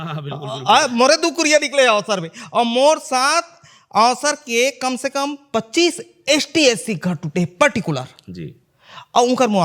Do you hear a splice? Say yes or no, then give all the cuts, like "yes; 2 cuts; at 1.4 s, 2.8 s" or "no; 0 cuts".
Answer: no; 0 cuts